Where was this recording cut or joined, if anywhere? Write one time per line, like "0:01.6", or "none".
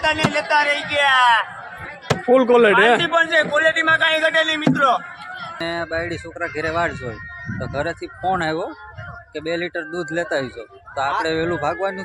0:05.5